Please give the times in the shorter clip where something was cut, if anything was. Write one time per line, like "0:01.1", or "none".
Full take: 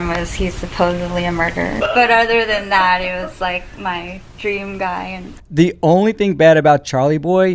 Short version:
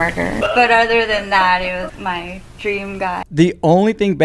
0:01.9
0:03.3